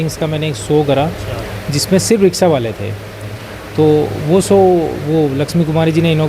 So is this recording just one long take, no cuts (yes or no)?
yes